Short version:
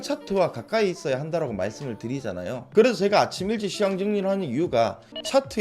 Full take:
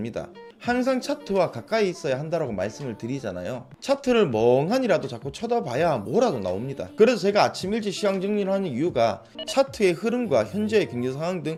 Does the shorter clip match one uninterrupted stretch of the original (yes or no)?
no